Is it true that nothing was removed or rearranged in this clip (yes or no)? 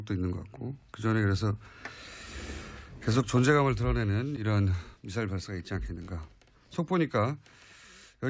no